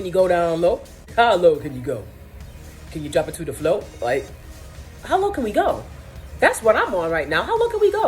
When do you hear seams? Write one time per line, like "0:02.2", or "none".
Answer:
0:00.9